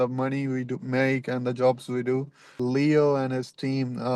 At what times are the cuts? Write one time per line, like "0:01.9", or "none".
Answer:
0:02.6